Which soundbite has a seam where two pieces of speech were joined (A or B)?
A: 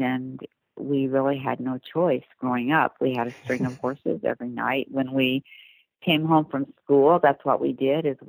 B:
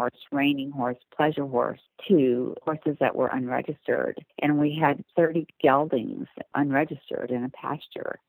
B